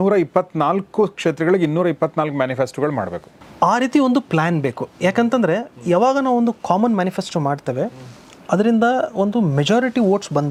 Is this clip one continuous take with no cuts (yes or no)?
yes